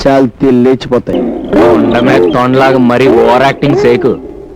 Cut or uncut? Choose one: cut